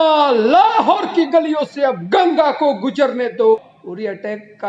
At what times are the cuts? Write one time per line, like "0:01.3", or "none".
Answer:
0:03.6